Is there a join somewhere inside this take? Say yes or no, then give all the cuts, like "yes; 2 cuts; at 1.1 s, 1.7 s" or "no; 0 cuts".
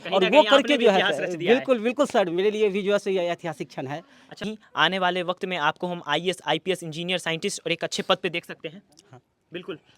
yes; 1 cut; at 4.4 s